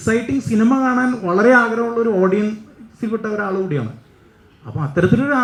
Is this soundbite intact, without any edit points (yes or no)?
yes